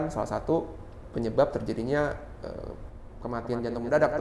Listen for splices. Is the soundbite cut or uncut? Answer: uncut